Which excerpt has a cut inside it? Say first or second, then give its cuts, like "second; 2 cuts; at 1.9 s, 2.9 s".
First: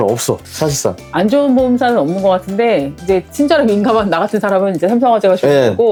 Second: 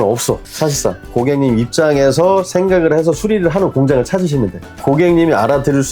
second; 2 cuts; at 1.1 s, 4.7 s